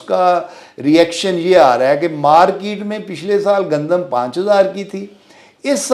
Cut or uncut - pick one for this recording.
uncut